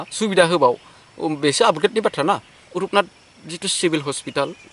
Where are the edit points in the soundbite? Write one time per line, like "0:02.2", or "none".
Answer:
0:02.6

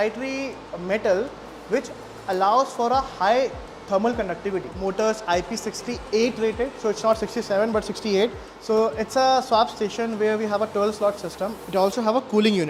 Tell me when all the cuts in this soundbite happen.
0:04.8
0:08.5
0:11.6

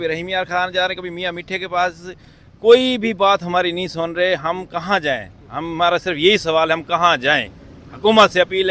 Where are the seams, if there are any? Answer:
none

